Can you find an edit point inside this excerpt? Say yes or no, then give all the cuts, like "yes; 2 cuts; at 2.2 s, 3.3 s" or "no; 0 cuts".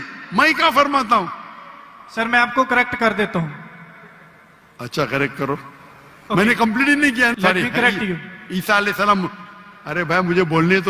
yes; 1 cut; at 7.3 s